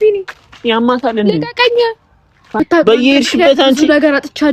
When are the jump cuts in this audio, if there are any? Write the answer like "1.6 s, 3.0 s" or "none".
2.5 s